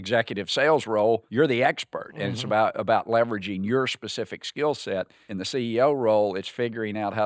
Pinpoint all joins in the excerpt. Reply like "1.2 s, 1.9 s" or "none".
1.3 s, 5.2 s